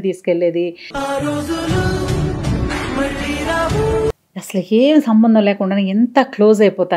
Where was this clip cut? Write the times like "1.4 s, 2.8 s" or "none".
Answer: 4.2 s